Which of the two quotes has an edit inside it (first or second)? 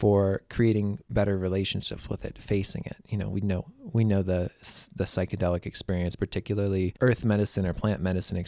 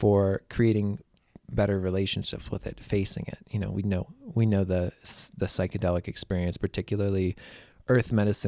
first